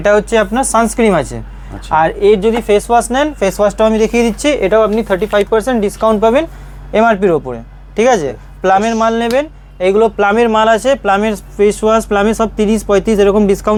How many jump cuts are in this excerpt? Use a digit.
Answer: 0